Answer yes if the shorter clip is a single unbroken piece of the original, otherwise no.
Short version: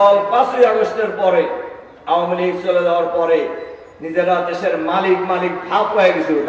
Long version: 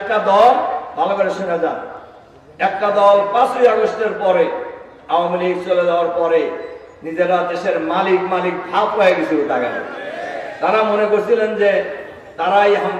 yes